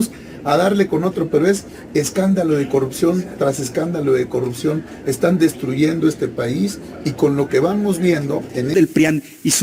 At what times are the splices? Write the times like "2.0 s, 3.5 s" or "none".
8.7 s